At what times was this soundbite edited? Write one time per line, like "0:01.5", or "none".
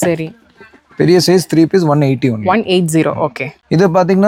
none